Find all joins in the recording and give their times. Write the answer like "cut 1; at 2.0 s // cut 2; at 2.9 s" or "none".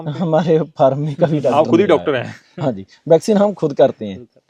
none